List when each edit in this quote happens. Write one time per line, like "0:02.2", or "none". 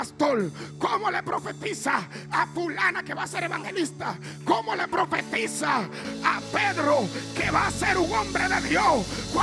0:06.0